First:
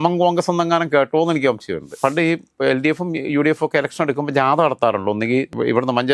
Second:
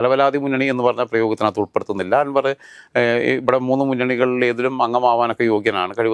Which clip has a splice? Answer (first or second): first